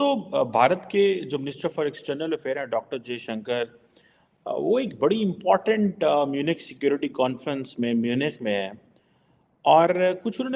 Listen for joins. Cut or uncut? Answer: uncut